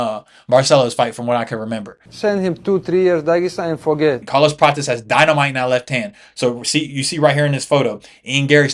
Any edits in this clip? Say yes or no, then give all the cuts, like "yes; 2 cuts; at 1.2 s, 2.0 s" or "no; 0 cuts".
yes; 1 cut; at 4.2 s